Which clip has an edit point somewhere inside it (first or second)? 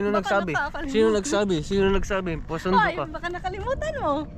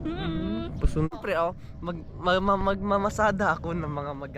second